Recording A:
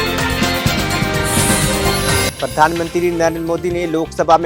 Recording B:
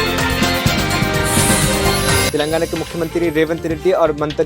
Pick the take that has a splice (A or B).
B